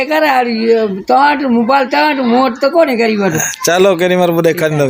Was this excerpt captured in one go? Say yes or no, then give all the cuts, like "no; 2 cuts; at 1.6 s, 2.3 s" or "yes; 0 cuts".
yes; 0 cuts